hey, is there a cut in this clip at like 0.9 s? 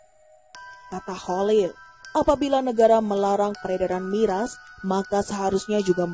yes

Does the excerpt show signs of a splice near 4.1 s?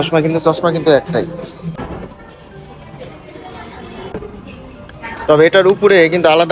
yes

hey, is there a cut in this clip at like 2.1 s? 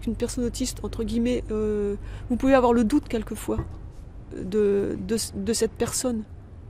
yes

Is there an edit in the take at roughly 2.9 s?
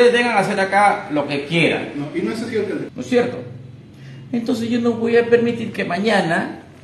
yes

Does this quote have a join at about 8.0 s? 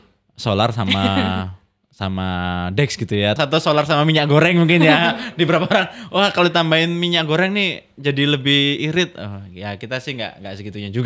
no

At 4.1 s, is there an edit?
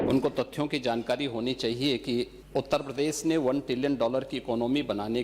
no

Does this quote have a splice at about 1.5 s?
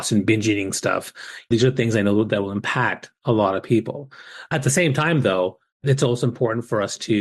yes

